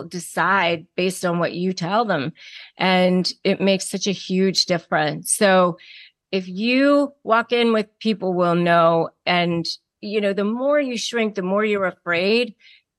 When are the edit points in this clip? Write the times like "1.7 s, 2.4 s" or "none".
7.9 s, 9.2 s